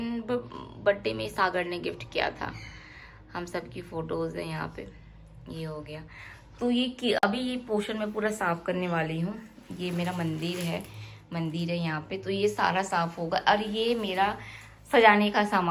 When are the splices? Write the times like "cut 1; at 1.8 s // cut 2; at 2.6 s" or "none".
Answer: none